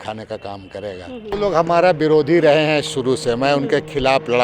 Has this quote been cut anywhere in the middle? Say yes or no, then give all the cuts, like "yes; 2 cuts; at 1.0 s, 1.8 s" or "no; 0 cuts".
yes; 1 cut; at 1.3 s